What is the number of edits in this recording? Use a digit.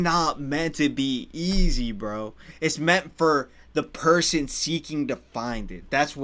1